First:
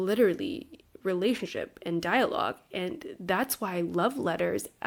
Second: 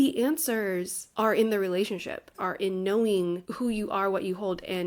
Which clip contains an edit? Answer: second; 3 cuts; at 1.0 s, 2.4 s, 3.5 s

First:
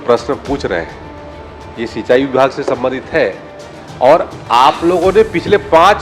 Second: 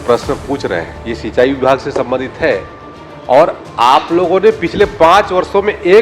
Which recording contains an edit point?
second; 1 cut; at 1.0 s

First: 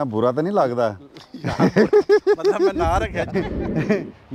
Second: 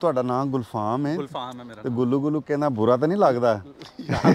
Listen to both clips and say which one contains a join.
first; 1 cut; at 3.3 s

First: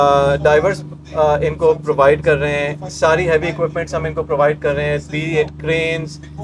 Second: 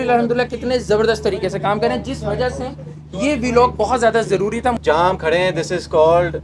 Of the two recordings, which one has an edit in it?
second; 1 cut; at 4.8 s

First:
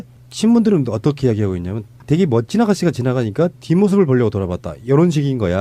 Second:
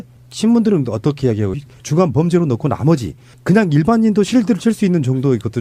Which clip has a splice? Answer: first; 1 cut; at 1.7 s

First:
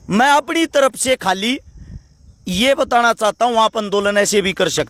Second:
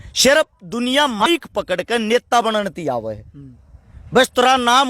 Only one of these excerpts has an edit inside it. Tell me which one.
second; 1 cut; at 1.3 s

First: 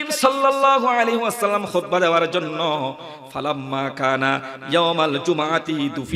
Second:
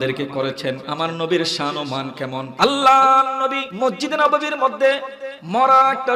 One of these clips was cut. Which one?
second; 3 cuts; at 0.9 s, 2.5 s, 3.6 s

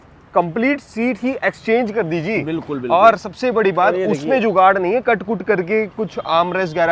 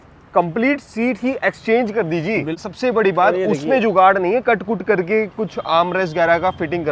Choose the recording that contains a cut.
second; 1 cut; at 2.7 s

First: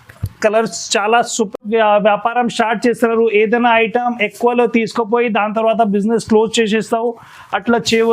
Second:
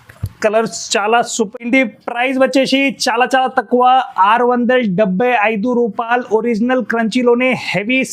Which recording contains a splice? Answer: first; 1 cut; at 1.6 s

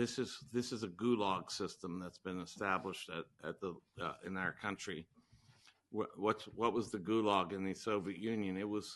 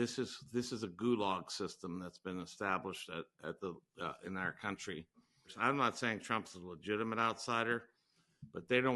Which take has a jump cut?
second; 1 cut; at 5.5 s

